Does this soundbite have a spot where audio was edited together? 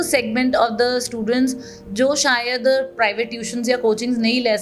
no; 0 cuts

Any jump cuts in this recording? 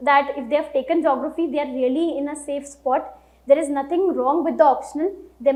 no; 0 cuts

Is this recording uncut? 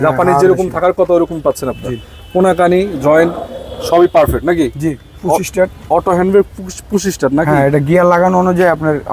no; 1 cut; at 5.0 s

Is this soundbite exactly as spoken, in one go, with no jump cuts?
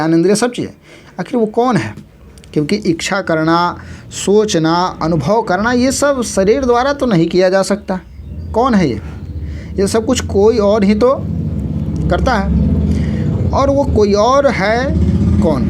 yes; 0 cuts

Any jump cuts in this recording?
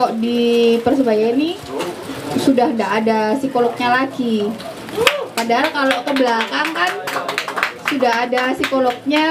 no; 0 cuts

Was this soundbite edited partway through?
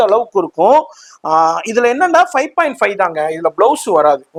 no; 0 cuts

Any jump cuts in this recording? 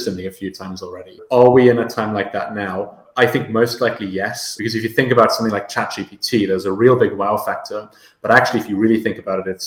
yes; 3 cuts; at 1.2 s, 3.0 s, 4.5 s

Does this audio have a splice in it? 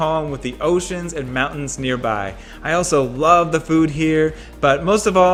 no; 0 cuts

